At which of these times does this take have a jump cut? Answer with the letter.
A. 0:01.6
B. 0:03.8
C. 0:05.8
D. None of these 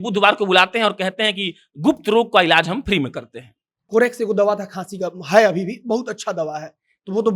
B